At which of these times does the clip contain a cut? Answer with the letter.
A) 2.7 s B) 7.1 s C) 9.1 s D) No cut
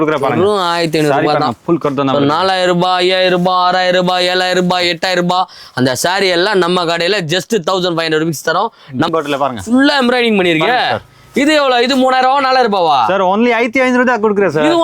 C